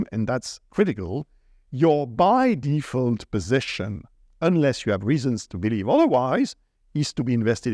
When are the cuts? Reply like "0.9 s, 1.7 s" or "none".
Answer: none